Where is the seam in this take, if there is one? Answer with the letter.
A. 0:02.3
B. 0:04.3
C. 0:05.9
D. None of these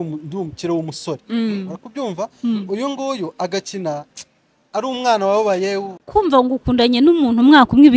C